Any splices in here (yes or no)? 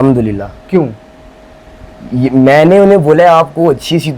no